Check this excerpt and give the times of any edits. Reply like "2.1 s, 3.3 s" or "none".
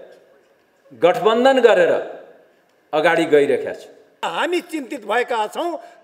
4.2 s